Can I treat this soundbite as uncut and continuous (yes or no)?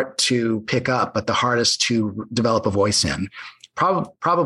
yes